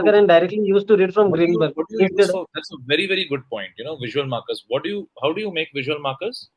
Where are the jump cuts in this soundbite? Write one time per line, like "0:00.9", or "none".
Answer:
none

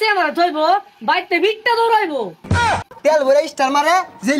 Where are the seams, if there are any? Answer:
0:02.7

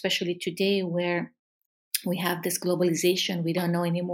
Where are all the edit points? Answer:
none

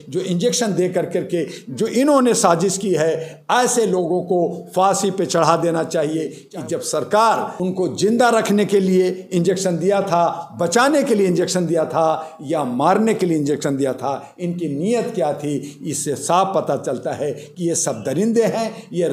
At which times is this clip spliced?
0:06.4
0:07.5

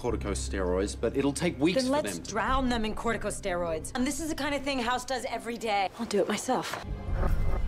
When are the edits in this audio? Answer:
none

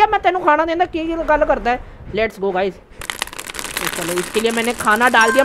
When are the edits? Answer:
none

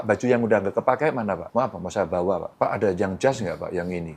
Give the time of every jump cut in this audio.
0:01.4
0:02.5

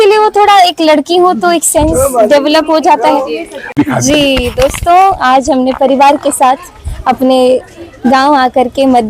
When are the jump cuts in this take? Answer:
0:03.7

